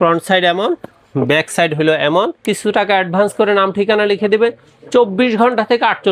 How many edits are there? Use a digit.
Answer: 1